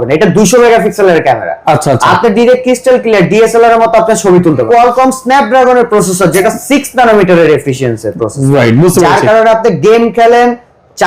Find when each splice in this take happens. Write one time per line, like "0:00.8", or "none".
0:04.6